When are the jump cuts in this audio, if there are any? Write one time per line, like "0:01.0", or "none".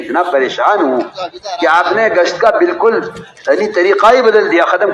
none